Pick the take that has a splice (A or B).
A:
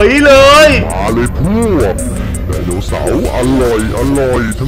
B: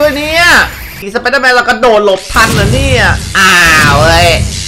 B